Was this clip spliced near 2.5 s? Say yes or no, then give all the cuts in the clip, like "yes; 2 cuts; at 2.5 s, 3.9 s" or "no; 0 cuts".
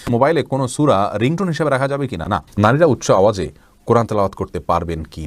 yes; 1 cut; at 2.5 s